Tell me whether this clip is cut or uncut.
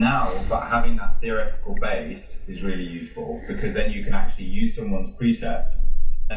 uncut